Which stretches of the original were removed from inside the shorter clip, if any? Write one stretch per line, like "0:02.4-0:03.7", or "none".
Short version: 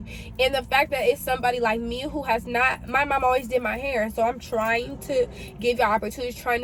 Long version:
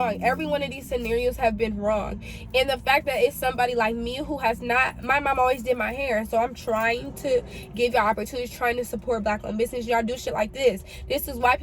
none